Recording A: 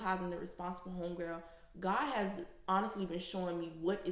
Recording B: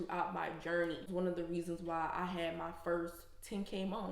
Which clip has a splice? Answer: B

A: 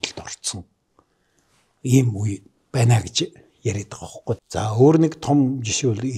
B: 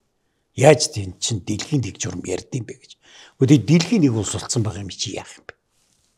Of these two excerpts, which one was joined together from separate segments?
A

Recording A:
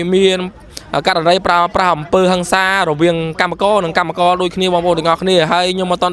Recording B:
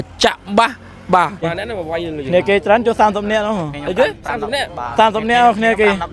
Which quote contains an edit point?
B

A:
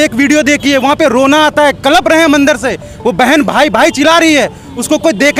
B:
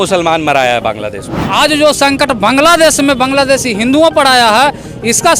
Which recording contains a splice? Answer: B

